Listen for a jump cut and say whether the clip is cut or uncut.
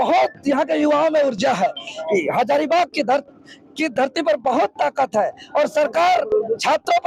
uncut